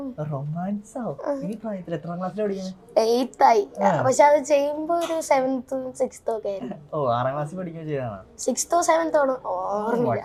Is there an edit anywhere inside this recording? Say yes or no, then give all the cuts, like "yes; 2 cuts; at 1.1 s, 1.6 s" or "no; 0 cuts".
no; 0 cuts